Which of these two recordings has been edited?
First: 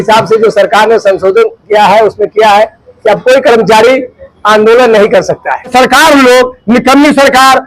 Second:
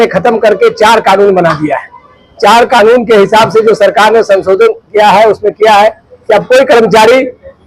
first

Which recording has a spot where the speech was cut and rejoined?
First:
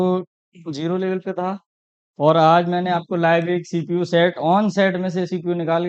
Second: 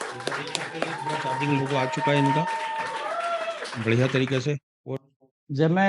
second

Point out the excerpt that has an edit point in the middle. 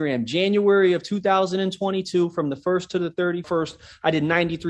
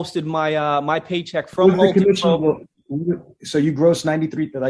first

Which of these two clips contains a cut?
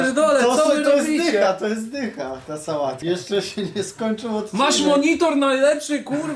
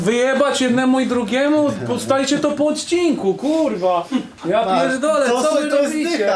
first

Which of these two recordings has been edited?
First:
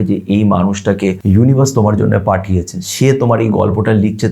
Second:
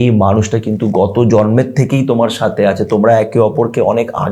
first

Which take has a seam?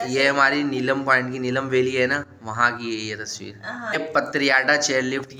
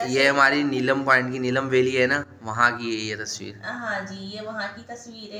first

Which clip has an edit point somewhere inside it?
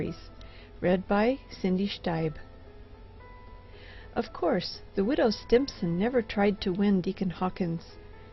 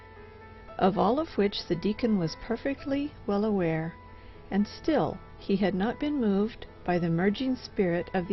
first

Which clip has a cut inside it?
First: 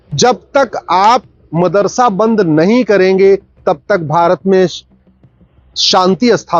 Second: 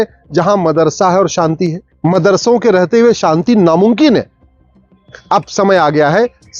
second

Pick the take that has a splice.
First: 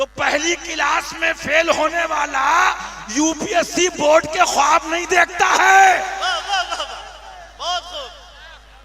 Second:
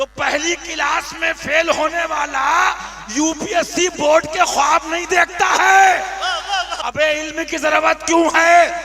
second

